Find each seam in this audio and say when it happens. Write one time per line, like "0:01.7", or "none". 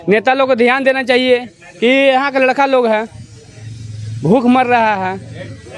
none